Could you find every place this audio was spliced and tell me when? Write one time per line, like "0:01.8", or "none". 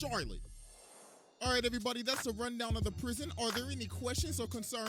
0:02.4